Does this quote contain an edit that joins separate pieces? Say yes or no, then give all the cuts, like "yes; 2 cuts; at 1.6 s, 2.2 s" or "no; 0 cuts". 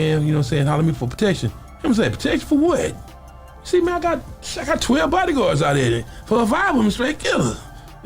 yes; 2 cuts; at 1.4 s, 6.1 s